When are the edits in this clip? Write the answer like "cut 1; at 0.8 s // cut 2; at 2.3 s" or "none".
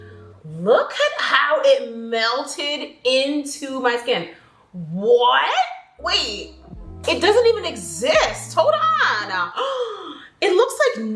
none